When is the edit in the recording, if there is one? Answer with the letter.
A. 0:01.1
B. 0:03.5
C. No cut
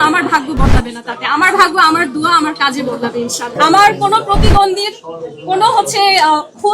B